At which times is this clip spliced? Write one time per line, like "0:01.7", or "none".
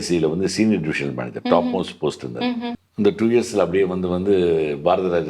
0:02.8